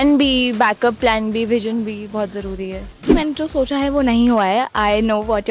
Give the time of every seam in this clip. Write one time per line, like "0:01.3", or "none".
0:03.0